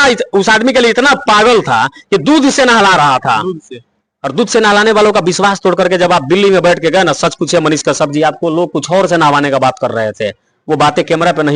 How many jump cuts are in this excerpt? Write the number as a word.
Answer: zero